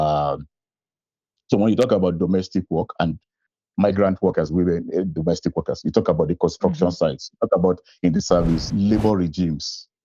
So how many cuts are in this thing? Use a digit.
1